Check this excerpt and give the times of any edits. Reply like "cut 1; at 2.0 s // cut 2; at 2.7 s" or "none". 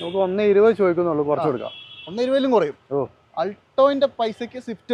none